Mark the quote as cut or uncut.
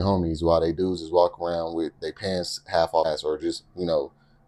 cut